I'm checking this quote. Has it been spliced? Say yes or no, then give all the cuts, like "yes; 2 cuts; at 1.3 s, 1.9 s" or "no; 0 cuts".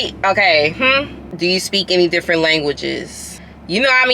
yes; 1 cut; at 1.3 s